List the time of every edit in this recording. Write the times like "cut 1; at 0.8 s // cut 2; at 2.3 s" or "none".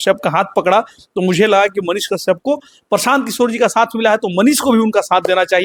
none